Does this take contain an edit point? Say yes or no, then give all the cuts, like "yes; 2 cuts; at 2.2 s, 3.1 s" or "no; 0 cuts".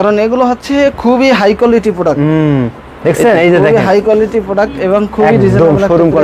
no; 0 cuts